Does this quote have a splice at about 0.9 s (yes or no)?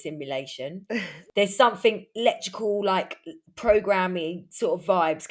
yes